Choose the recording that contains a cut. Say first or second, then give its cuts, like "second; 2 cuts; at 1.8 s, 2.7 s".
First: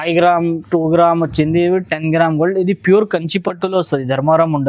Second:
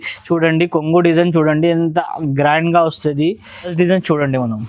second; 1 cut; at 3.7 s